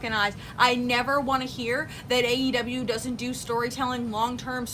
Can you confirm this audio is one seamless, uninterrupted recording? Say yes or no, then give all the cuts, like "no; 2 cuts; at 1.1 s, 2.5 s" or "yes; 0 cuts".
yes; 0 cuts